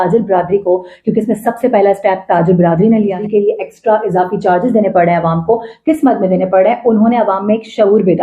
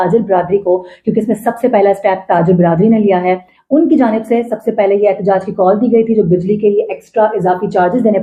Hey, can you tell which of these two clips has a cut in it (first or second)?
first